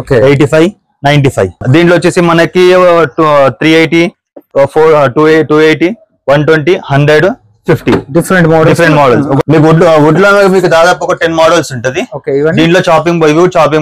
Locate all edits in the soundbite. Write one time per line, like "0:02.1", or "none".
0:01.6
0:09.4